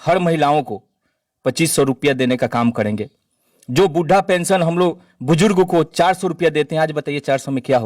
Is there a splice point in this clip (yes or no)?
no